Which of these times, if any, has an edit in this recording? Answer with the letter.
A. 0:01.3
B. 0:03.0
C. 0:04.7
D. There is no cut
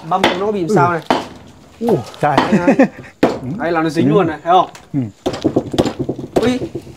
B